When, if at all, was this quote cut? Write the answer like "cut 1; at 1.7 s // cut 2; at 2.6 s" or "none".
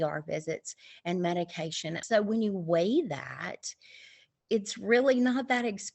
cut 1; at 1.9 s